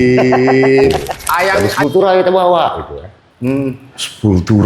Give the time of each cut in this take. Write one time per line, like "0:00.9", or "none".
0:01.7

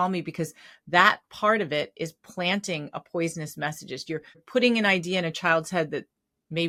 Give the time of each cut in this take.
none

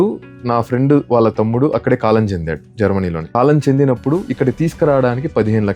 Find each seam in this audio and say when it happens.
0:03.2

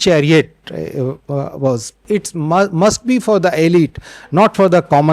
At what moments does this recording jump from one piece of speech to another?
0:02.0

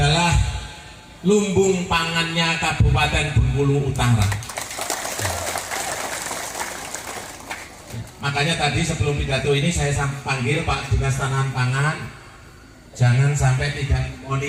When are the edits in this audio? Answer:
none

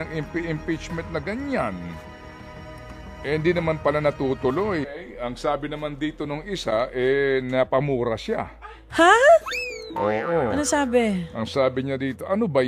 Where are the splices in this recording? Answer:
0:04.8

